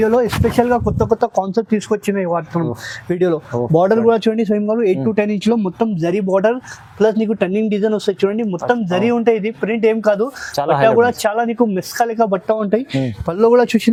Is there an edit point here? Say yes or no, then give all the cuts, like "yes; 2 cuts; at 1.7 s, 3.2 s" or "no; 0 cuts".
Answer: no; 0 cuts